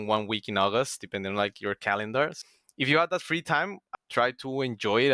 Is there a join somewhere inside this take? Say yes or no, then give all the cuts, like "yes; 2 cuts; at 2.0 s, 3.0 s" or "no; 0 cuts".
yes; 2 cuts; at 2.4 s, 3.8 s